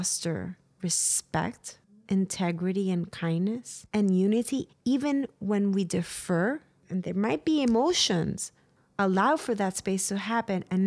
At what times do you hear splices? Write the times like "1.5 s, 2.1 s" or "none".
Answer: 3.7 s